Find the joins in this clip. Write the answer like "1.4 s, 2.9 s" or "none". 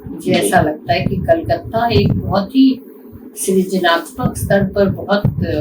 none